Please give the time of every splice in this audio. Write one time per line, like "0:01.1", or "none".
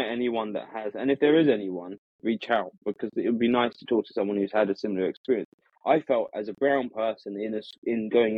none